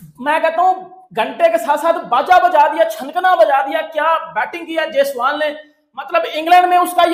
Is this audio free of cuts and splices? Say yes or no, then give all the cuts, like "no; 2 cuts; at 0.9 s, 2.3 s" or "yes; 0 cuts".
yes; 0 cuts